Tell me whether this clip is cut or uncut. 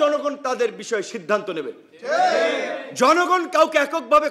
uncut